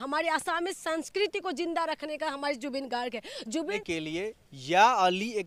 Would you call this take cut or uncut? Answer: cut